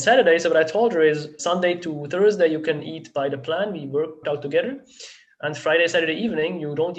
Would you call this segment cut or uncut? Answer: cut